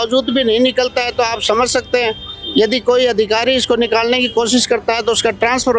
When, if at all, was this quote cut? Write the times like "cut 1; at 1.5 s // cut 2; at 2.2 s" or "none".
none